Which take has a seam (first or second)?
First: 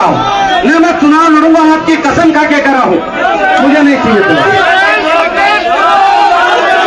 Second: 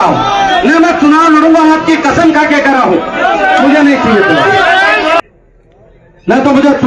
second